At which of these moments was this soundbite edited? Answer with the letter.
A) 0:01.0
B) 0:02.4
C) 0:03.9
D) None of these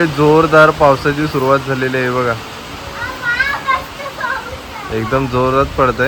D